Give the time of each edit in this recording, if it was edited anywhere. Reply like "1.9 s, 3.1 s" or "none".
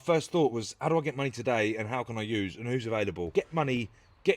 3.3 s